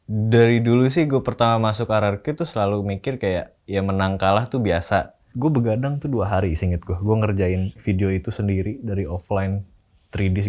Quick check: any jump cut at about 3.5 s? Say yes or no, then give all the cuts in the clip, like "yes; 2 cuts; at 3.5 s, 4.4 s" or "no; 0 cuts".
no; 1 cut; at 5.3 s